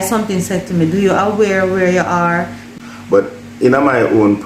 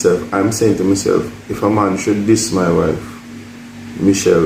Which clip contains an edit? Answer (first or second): first